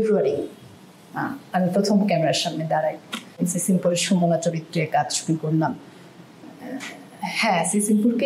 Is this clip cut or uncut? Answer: cut